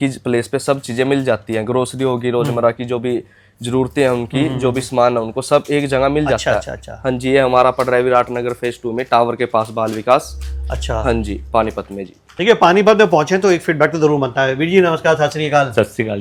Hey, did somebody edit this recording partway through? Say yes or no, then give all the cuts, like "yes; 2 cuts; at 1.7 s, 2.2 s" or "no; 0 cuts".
no; 0 cuts